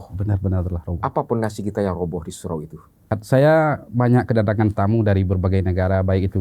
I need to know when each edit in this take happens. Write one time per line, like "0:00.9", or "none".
0:03.2